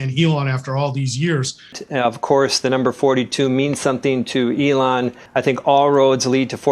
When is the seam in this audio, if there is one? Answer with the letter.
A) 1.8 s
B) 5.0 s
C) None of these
A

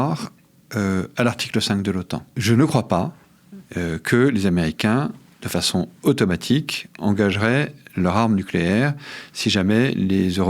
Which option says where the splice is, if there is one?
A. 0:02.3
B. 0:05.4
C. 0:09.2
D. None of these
A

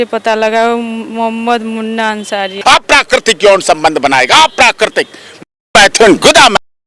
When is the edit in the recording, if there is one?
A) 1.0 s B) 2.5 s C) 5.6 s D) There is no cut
B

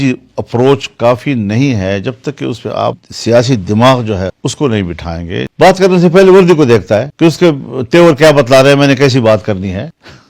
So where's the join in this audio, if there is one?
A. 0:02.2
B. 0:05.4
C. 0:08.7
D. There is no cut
B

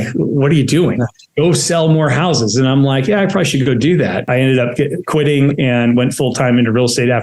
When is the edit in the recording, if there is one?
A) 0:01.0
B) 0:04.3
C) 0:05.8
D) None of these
B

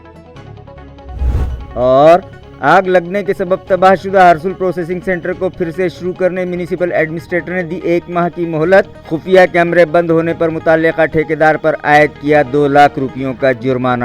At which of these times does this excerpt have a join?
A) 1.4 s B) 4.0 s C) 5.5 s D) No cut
A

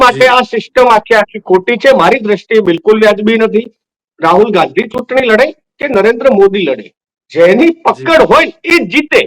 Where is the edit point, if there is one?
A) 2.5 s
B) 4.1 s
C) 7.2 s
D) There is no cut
B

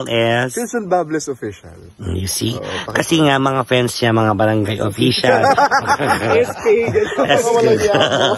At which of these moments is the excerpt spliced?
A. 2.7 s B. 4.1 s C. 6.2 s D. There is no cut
D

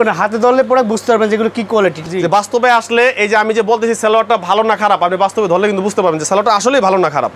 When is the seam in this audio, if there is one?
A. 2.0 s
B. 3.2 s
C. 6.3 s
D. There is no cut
A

